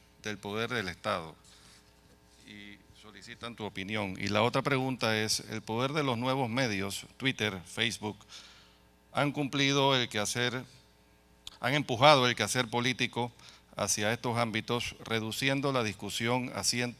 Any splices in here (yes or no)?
yes